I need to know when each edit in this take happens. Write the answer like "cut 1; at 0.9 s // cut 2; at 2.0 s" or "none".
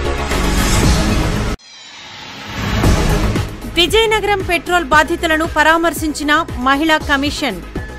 cut 1; at 3.3 s